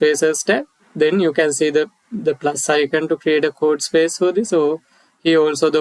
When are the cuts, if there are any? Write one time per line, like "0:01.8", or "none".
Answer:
none